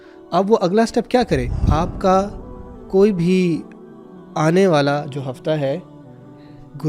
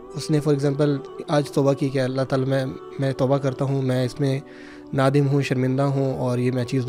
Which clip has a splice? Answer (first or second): first